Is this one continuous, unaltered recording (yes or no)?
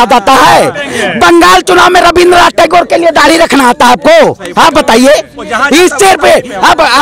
yes